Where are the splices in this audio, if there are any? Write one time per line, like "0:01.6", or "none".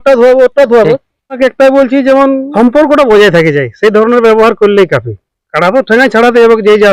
0:01.4
0:02.5